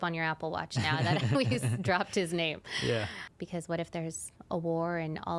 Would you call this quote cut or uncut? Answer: cut